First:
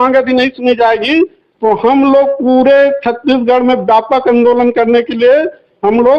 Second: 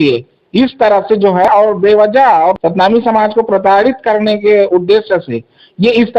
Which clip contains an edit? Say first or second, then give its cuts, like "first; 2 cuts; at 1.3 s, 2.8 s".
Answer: second; 2 cuts; at 1.5 s, 2.6 s